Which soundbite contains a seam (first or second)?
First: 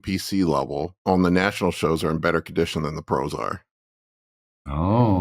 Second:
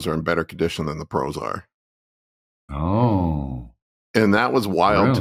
first